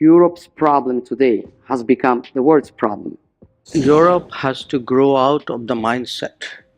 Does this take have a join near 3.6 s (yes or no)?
yes